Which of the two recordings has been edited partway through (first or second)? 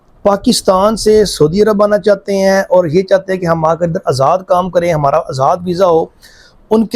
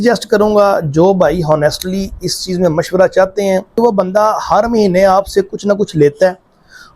second